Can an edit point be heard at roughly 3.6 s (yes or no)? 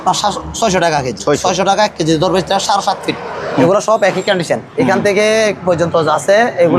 yes